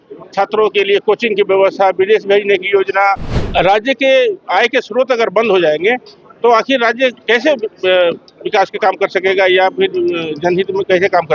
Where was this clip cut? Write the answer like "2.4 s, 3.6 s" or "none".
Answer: 3.3 s